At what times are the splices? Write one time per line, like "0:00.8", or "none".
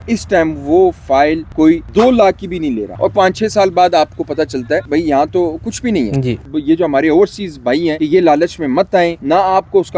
0:02.9
0:06.4
0:09.2

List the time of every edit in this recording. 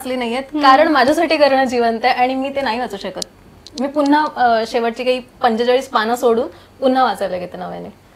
none

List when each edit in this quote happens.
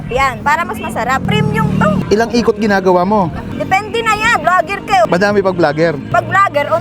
0:02.0
0:03.5

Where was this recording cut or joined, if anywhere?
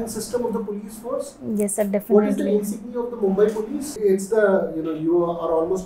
0:03.9

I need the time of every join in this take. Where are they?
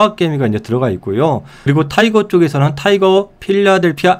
0:01.5

